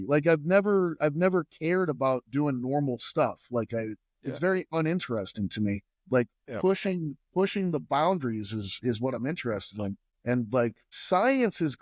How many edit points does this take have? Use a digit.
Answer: 3